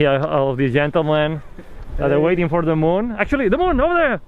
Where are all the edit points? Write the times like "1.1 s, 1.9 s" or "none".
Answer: 3.1 s